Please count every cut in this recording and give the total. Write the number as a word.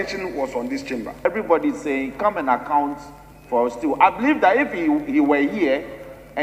one